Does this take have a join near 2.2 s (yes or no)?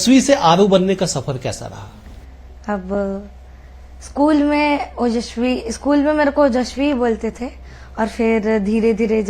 no